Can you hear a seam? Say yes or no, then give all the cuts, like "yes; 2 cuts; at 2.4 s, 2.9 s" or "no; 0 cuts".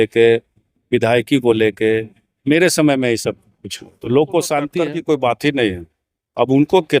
yes; 1 cut; at 4.9 s